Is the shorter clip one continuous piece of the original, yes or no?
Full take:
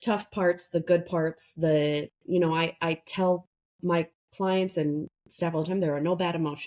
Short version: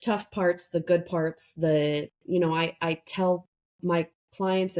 yes